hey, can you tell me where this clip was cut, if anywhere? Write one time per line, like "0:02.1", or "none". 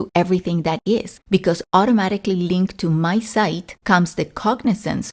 0:01.1
0:03.7